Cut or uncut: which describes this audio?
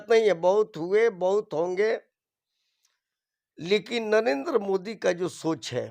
uncut